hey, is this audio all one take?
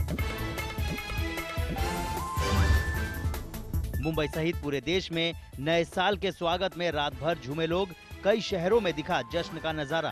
no; 2 cuts; at 0.8 s, 2.5 s

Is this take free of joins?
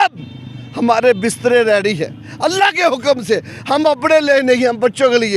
yes; 0 cuts

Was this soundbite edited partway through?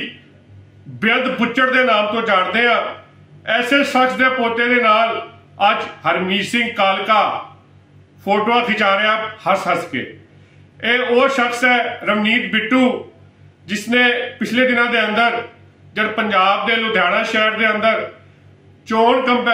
no; 0 cuts

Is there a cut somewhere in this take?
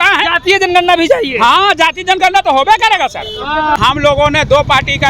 yes; 1 cut; at 3.8 s

